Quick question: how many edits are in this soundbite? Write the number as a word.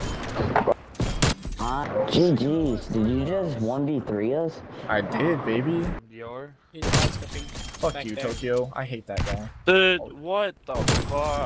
two